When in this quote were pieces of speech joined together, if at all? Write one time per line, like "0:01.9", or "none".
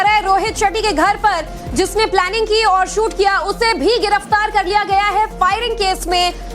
0:04.5